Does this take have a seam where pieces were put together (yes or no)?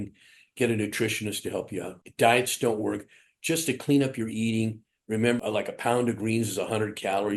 yes